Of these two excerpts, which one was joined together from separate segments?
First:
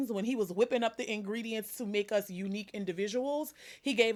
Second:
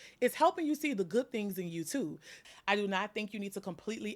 second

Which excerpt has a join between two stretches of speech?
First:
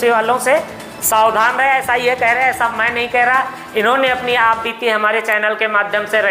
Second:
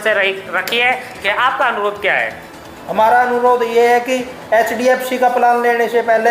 second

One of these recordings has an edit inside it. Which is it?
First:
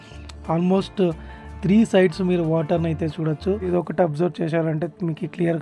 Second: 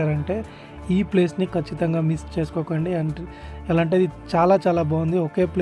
first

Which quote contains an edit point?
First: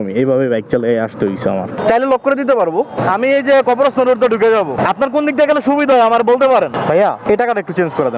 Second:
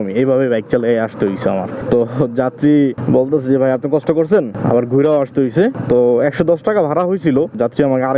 first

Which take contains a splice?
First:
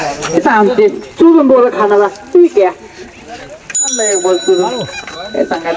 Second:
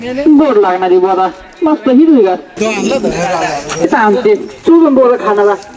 second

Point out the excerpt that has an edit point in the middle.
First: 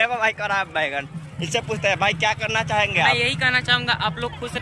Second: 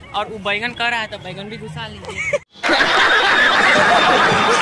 second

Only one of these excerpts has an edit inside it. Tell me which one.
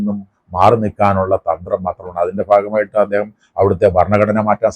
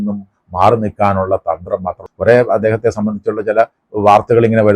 second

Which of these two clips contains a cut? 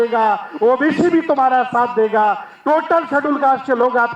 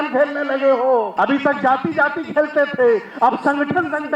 second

